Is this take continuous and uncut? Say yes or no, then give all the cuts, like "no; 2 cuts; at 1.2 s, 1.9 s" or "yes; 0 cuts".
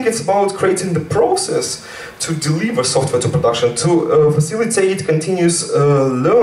yes; 0 cuts